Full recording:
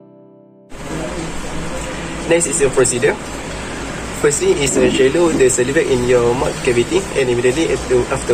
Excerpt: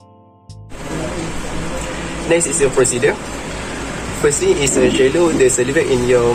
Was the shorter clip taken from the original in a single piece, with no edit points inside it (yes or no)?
yes